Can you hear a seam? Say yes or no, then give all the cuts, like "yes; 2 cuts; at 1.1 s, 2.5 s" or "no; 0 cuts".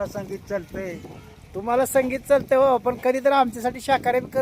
no; 0 cuts